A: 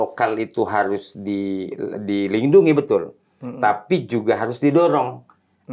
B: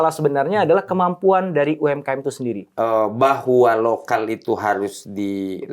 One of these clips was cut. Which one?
B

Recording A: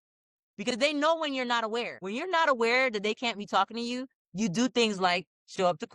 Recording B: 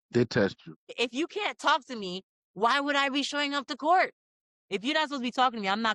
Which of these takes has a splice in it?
A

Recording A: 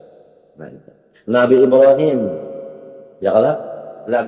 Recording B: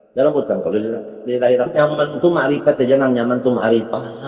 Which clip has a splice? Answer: B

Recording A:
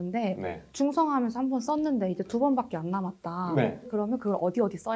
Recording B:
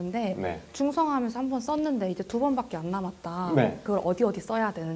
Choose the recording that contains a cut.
B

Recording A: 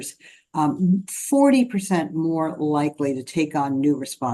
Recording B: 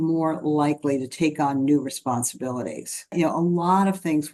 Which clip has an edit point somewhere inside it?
B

